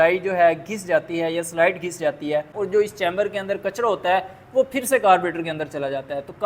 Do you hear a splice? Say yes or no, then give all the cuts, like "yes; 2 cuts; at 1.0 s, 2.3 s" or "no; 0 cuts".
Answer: yes; 1 cut; at 2.6 s